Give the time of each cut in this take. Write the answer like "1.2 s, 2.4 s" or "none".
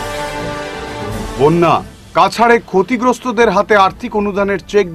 none